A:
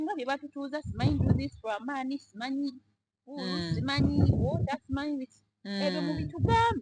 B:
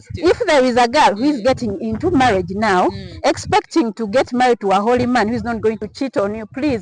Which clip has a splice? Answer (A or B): B